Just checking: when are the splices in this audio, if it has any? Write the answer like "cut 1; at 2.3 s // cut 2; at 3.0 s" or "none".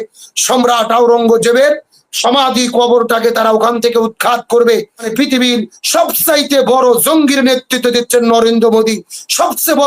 cut 1; at 5.1 s